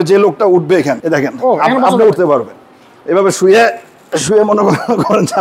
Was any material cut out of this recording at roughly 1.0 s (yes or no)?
yes